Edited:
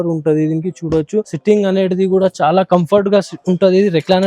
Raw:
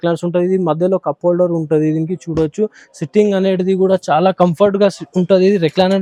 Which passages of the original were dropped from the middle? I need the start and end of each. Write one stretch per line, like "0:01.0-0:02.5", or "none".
0:02.8-0:03.0